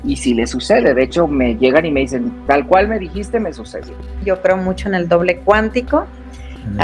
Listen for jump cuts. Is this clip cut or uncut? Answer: cut